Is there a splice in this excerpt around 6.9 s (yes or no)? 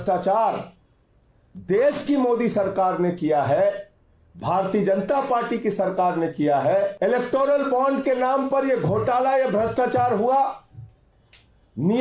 yes